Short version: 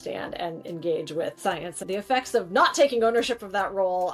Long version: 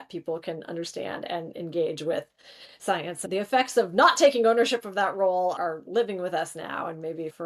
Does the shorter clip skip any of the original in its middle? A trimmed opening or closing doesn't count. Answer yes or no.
yes